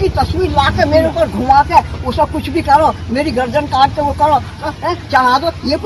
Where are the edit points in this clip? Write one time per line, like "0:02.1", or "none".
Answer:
none